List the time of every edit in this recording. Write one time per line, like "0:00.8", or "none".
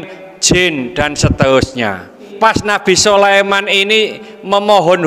0:02.3

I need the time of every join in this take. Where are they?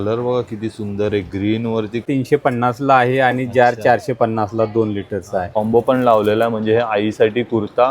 0:02.0
0:05.6

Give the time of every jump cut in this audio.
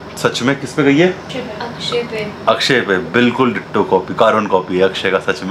none

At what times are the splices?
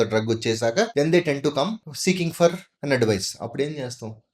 0:00.9
0:01.9

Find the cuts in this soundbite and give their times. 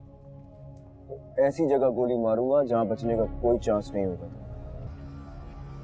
0:04.9

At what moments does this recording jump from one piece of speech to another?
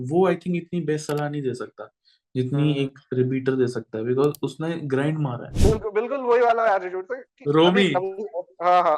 0:05.5

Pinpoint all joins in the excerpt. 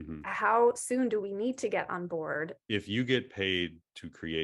0:02.6

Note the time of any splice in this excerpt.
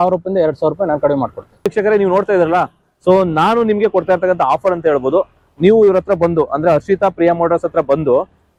none

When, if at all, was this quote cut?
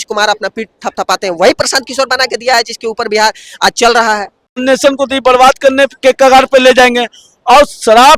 0:04.5

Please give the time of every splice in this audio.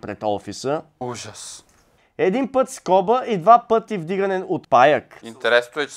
none

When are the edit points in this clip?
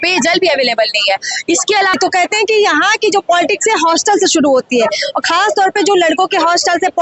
0:02.0

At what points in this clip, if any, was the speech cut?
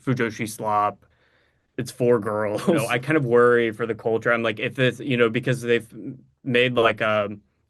0:02.9

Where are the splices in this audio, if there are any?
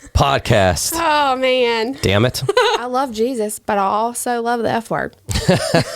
0:02.9

